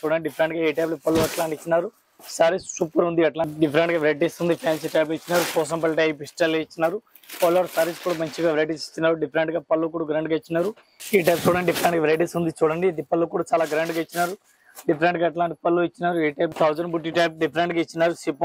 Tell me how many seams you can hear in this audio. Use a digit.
3